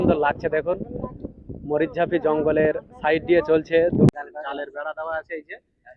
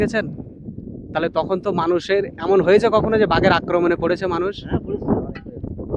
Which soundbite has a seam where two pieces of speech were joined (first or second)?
first